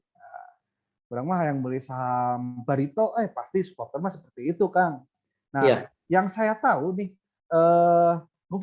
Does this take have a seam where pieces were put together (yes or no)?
no